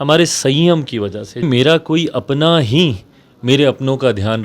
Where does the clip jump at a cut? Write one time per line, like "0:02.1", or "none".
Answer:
0:01.4